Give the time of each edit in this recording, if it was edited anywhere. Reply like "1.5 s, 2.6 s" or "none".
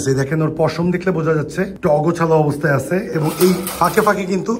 none